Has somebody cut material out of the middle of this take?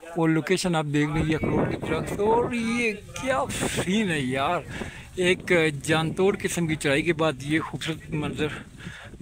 no; 0 cuts

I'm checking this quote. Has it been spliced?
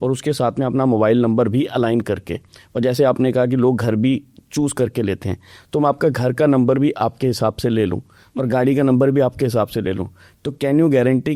no; 0 cuts

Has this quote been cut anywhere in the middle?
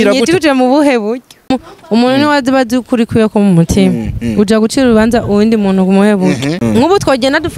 yes; 2 cuts; at 1.5 s, 6.6 s

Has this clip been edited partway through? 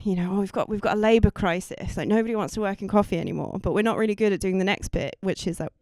no; 0 cuts

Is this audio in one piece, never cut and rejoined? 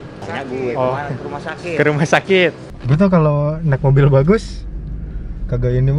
no; 1 cut; at 2.7 s

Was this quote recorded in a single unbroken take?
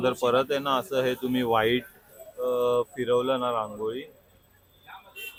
yes; 0 cuts

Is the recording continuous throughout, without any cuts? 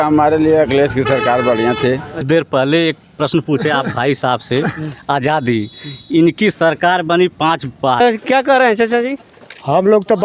no; 2 cuts; at 2.2 s, 8.0 s

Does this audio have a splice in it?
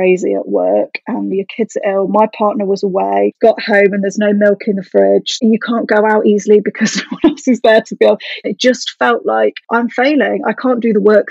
yes; 2 cuts; at 5.4 s, 8.4 s

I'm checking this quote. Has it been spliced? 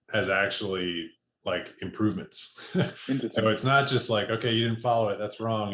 no; 0 cuts

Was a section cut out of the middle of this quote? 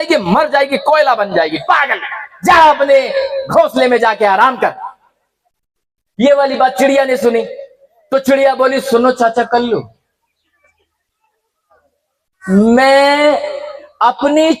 no; 0 cuts

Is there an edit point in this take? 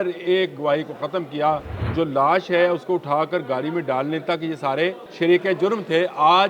yes; 2 cuts; at 1.8 s, 5.0 s

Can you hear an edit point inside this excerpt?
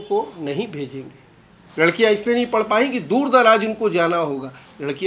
no; 0 cuts

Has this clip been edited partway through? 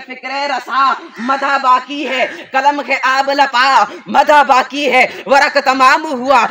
no; 0 cuts

